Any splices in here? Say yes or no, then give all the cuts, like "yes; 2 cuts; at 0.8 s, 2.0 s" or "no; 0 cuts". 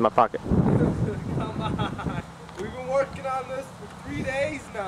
yes; 1 cut; at 2.2 s